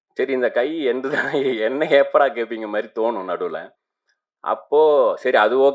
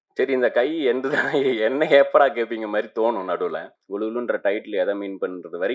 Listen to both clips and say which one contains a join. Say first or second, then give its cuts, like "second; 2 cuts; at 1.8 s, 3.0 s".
second; 1 cut; at 3.7 s